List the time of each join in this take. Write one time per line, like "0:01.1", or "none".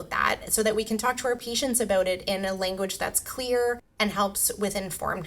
0:03.9